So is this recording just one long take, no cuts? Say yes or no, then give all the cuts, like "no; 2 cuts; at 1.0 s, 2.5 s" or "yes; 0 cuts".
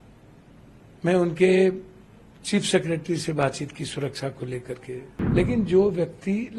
no; 1 cut; at 5.1 s